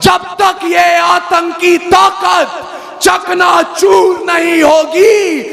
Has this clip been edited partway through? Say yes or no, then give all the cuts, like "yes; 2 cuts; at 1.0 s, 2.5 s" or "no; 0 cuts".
no; 0 cuts